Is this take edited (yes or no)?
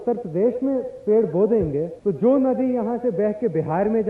yes